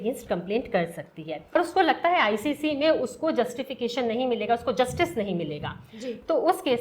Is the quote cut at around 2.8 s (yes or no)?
no